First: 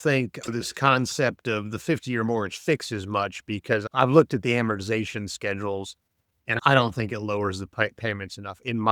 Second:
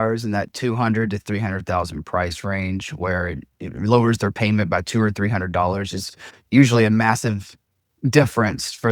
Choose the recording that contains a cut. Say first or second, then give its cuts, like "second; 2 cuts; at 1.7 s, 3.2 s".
first; 1 cut; at 1.8 s